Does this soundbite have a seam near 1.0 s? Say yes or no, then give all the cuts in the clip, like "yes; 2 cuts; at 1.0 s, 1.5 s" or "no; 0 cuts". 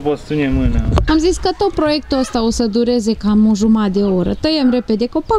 yes; 1 cut; at 1.0 s